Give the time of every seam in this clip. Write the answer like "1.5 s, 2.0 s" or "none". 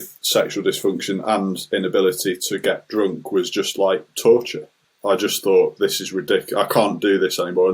4.9 s